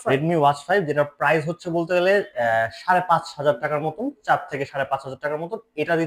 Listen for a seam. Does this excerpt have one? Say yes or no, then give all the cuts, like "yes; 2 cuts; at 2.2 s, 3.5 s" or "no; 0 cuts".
no; 0 cuts